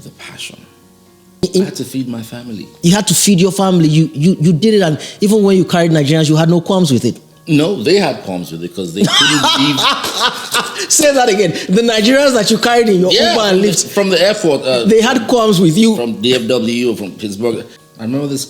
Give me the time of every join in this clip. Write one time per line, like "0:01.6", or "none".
0:01.4
0:17.7